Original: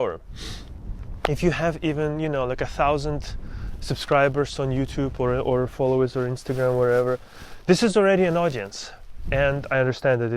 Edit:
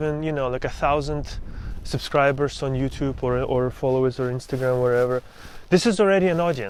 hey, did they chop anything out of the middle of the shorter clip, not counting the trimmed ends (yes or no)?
no